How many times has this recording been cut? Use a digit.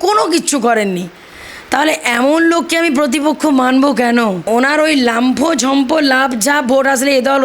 1